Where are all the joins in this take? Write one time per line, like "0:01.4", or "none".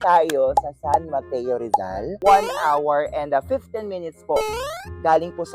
0:02.1